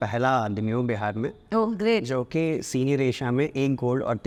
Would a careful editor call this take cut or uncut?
uncut